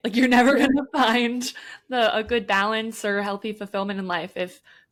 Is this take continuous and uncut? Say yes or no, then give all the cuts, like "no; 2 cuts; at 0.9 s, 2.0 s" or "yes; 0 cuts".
yes; 0 cuts